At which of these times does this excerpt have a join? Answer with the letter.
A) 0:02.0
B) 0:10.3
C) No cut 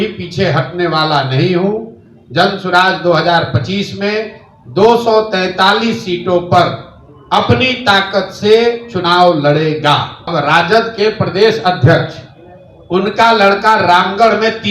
B